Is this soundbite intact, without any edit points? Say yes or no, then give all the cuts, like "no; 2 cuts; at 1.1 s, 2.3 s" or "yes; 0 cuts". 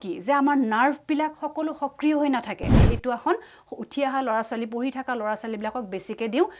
no; 1 cut; at 2.8 s